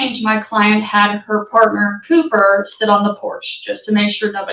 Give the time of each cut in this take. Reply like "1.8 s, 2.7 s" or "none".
none